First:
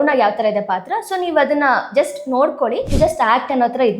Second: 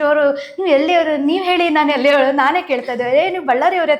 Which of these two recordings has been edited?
first; 1 cut; at 2.9 s

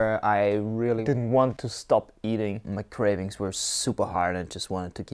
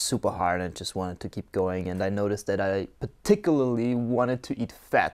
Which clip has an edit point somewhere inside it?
first; 3 cuts; at 1.0 s, 1.7 s, 2.7 s

